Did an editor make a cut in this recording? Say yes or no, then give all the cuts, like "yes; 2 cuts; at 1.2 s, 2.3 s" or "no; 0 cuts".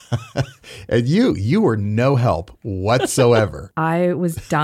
yes; 1 cut; at 3.7 s